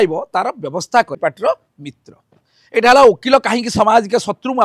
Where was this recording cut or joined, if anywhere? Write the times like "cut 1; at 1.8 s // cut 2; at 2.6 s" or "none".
cut 1; at 1.1 s